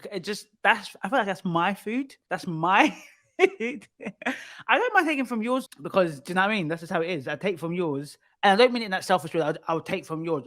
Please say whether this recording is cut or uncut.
cut